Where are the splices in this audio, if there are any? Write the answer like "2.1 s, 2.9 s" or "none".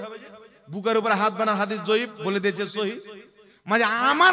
none